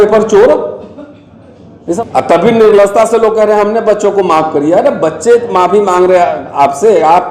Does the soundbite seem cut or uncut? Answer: cut